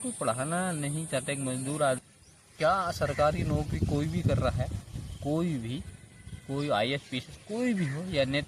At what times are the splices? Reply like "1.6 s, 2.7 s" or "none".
2.0 s